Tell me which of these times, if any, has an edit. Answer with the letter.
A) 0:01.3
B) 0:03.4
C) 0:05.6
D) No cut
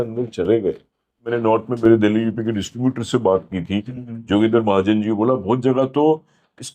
A